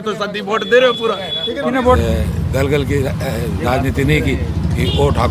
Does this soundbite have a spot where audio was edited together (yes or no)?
yes